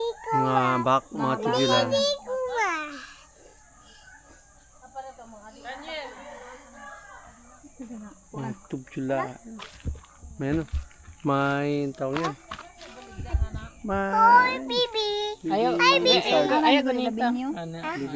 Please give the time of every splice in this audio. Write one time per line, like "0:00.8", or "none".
none

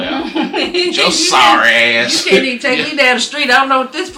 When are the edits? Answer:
none

